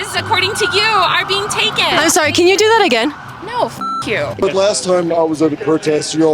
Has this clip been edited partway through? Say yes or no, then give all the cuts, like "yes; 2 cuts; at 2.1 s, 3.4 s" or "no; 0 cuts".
yes; 2 cuts; at 2.0 s, 4.4 s